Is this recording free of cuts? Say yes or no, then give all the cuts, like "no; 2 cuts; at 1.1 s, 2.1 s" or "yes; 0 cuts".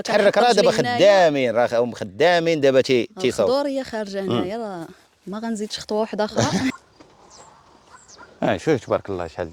no; 1 cut; at 6.7 s